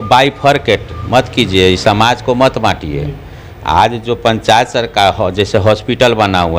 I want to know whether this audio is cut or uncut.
uncut